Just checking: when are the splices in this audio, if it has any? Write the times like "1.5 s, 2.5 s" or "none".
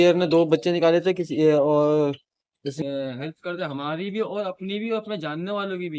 2.8 s